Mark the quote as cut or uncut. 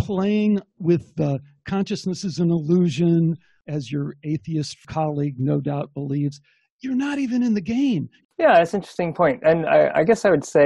cut